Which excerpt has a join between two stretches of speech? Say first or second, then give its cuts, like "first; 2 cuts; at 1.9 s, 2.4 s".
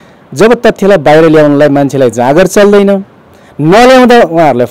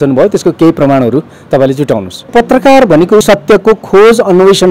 second; 2 cuts; at 2.3 s, 3.2 s